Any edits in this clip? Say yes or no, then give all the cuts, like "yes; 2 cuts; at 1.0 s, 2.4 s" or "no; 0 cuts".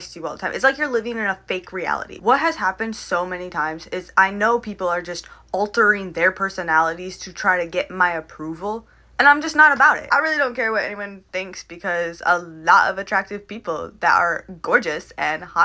yes; 2 cuts; at 2.1 s, 10.0 s